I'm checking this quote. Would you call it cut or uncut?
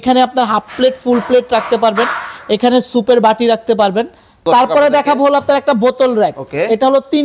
cut